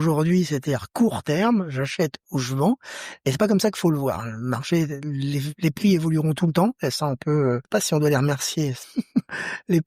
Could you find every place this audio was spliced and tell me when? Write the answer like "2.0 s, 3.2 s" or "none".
7.6 s, 8.8 s

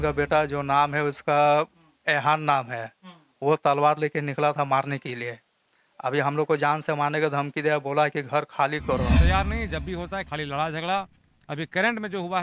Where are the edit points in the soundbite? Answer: 9.1 s

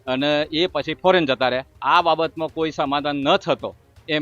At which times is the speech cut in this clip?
1.7 s

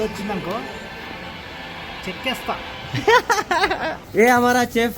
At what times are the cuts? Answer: 4.0 s

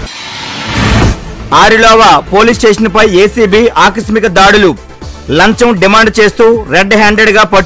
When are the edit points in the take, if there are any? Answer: 1.1 s

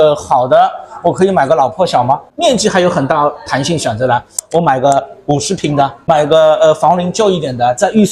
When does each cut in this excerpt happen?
2.3 s, 4.4 s, 6.0 s

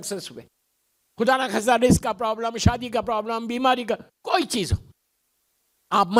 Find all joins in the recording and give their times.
none

